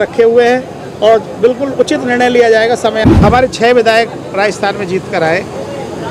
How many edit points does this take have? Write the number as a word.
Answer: one